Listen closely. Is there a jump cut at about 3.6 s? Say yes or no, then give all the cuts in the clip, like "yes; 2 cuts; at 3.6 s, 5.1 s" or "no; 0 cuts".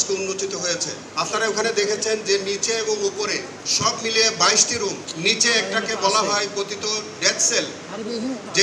yes; 3 cuts; at 1.0 s, 3.6 s, 5.1 s